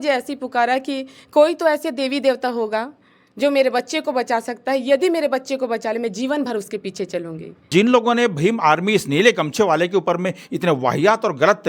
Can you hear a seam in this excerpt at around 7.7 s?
yes; 1 cut; at 7.7 s

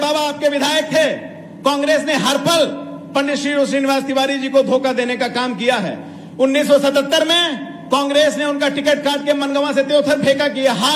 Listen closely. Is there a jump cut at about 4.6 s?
no; 0 cuts

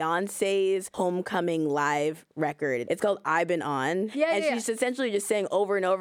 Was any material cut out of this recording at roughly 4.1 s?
yes; 3 cuts; at 0.9 s, 2.8 s, 4.1 s

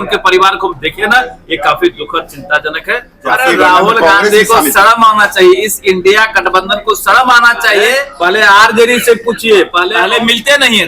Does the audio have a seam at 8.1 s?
yes; 3 cuts; at 3.1 s, 8.1 s, 9.9 s

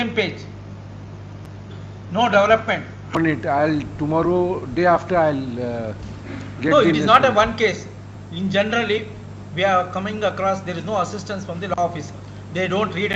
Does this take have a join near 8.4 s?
no; 1 cut; at 3.1 s

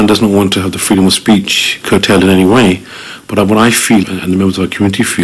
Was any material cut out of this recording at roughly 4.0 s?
yes; 1 cut; at 4.0 s

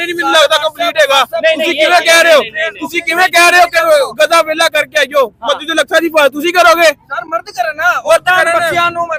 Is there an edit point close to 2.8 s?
no; 0 cuts

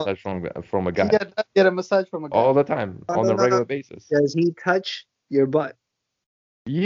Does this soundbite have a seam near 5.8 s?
no; 0 cuts

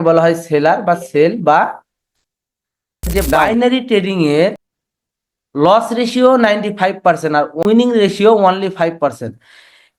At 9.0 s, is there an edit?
no; 3 cuts; at 3.1 s, 4.7 s, 7.6 s

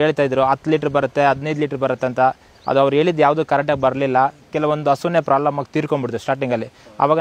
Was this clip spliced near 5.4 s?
no; 0 cuts

